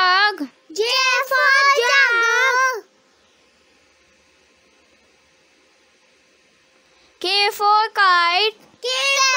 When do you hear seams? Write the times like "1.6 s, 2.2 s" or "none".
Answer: 7.0 s